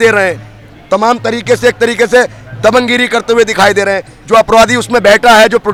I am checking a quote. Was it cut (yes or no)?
no